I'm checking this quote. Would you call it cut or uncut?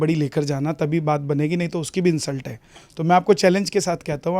uncut